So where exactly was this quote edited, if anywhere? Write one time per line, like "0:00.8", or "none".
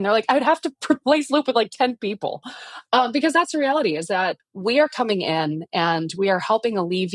0:04.4